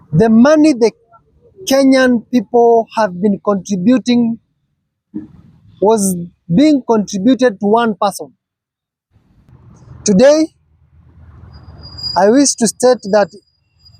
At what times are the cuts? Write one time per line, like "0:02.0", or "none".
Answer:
0:09.4